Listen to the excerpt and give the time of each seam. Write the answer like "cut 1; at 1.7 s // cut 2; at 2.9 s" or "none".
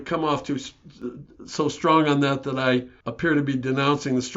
cut 1; at 3.0 s